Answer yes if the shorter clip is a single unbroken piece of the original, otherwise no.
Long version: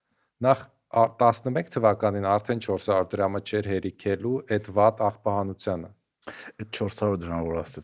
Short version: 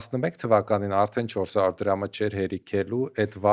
yes